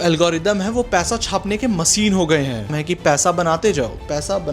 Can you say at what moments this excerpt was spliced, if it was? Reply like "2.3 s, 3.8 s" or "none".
2.7 s